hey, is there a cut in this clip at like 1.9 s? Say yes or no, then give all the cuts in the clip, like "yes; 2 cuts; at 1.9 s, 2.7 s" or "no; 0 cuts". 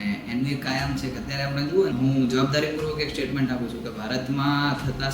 yes; 1 cut; at 1.9 s